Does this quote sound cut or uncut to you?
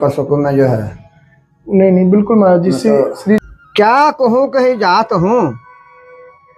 cut